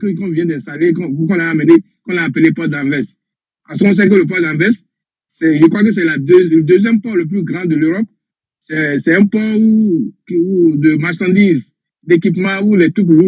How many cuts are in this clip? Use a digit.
0